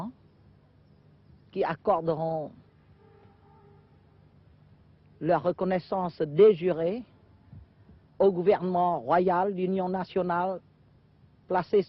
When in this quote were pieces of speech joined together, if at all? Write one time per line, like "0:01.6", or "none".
0:07.1